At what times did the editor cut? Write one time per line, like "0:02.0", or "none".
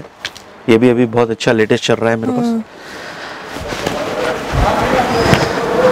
none